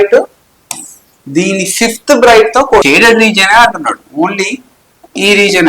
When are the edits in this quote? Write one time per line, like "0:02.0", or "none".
0:02.8